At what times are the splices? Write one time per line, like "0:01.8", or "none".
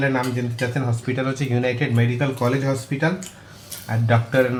none

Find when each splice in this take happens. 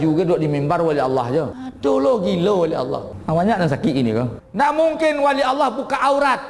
0:01.6
0:03.1
0:04.4

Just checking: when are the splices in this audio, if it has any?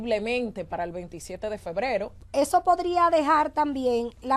0:02.2

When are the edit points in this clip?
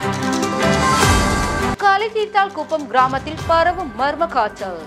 0:01.7

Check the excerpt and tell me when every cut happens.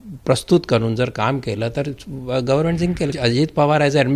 0:03.1

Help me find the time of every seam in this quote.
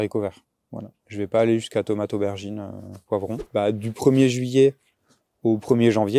0:03.4

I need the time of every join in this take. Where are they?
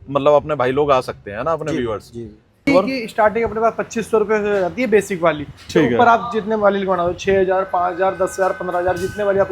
0:02.7

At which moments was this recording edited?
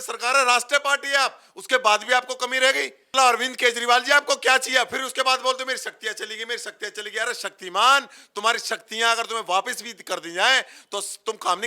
0:03.0

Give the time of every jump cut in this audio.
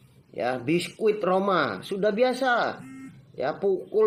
none

